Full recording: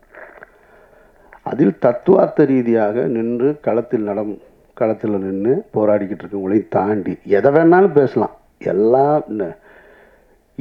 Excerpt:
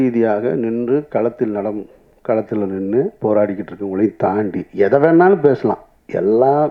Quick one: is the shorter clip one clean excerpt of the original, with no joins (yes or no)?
yes